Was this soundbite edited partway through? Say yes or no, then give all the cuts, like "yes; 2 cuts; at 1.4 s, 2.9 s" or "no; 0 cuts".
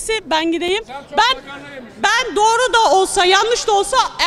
no; 0 cuts